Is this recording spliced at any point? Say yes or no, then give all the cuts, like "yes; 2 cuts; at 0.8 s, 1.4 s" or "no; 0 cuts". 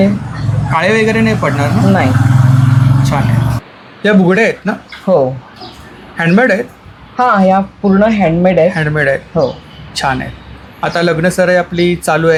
no; 0 cuts